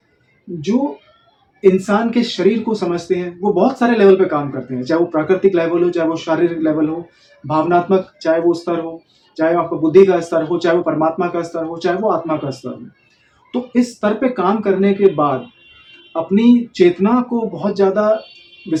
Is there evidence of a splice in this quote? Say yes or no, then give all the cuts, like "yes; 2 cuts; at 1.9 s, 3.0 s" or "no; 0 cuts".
no; 0 cuts